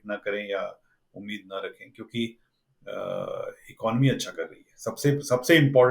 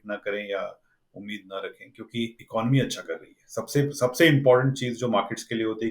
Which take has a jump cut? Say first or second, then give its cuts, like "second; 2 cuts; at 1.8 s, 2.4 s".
second; 1 cut; at 2.4 s